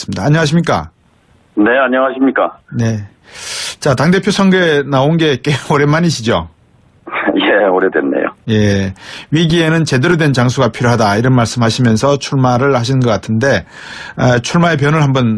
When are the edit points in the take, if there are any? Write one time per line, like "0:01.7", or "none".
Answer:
none